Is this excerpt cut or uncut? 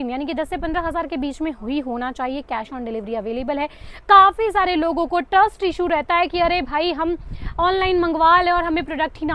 uncut